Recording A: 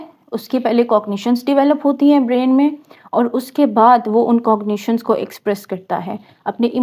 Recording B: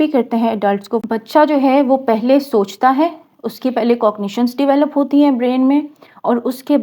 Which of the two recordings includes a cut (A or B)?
B